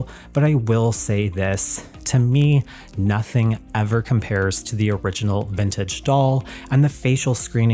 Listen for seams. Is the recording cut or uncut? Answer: uncut